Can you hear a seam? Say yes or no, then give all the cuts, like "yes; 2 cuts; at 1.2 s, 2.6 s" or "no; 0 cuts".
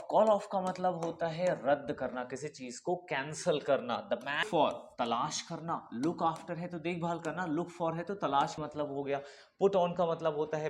yes; 2 cuts; at 4.4 s, 8.6 s